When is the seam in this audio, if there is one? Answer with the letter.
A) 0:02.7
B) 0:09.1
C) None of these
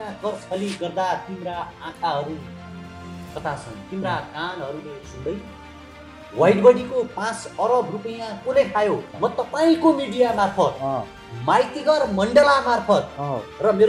B